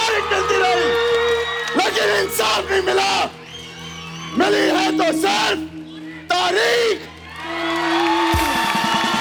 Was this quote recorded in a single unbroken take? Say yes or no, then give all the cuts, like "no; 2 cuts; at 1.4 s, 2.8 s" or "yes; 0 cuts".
yes; 0 cuts